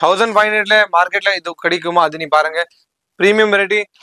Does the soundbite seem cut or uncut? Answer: uncut